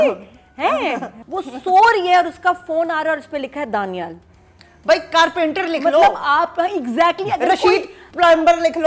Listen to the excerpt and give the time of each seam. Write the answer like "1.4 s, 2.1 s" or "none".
1.1 s